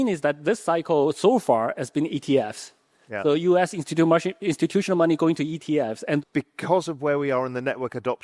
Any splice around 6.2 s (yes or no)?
yes